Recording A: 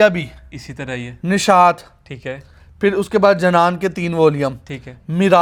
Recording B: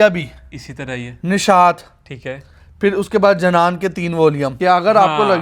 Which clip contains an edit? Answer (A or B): B